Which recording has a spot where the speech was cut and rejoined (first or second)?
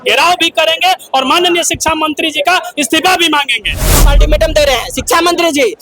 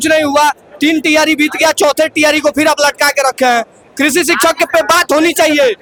first